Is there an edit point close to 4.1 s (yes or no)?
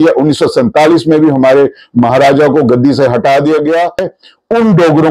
yes